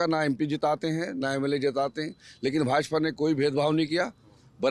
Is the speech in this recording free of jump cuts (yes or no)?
yes